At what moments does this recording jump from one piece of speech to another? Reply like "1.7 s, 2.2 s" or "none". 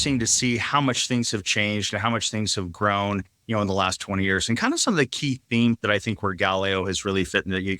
none